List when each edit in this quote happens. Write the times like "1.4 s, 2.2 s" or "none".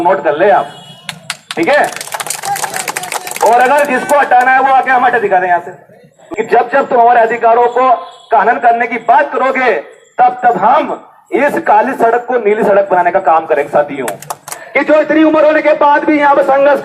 6.2 s, 14.6 s